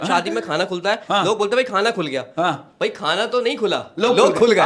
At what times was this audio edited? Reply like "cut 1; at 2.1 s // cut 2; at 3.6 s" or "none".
none

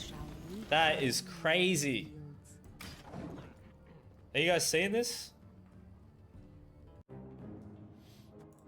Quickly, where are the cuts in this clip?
cut 1; at 7.0 s

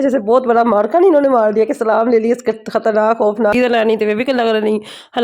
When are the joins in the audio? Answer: cut 1; at 3.5 s

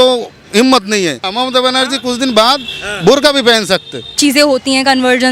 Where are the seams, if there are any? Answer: cut 1; at 1.2 s // cut 2; at 4.0 s

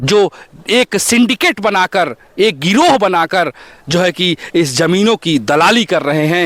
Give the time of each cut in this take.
none

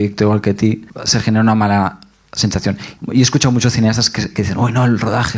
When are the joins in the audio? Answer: cut 1; at 0.9 s // cut 2; at 2.9 s

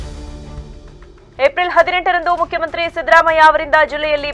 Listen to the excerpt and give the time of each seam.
cut 1; at 1.2 s

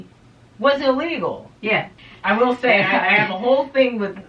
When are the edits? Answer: cut 1; at 2.0 s

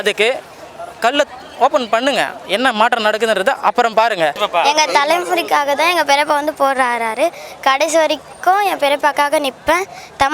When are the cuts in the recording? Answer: cut 1; at 4.4 s

